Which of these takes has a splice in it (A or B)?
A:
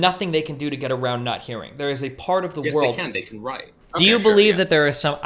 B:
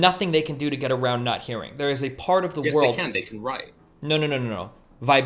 A